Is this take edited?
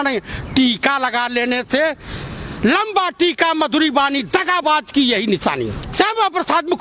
yes; 1 cut; at 5.8 s

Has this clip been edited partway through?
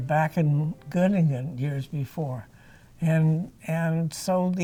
no; 0 cuts

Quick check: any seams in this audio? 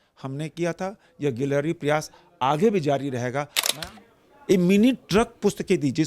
yes; 1 cut; at 3.6 s

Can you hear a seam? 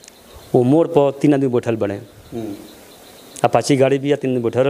no; 0 cuts

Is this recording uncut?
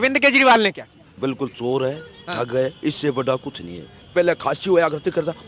no; 2 cuts; at 1.1 s, 4.1 s

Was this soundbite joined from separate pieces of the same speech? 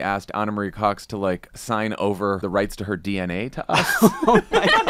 yes; 2 cuts; at 1.5 s, 2.4 s

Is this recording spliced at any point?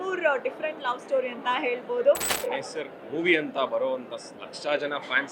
yes; 1 cut; at 2.3 s

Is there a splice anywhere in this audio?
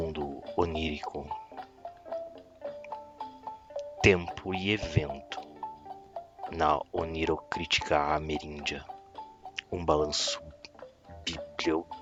no; 0 cuts

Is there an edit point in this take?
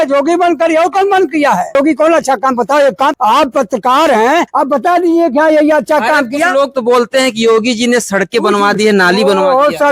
yes; 3 cuts; at 1.8 s, 3.2 s, 4.5 s

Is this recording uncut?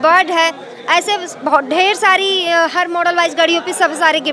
yes; 0 cuts

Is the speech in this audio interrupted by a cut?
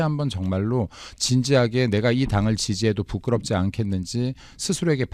no; 0 cuts

